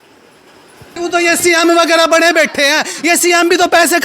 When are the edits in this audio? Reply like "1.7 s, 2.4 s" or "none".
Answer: 0.9 s